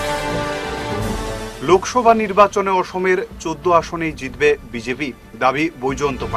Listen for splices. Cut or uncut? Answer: uncut